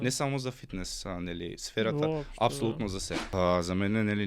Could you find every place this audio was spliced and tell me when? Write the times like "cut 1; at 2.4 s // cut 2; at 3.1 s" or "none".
cut 1; at 3.3 s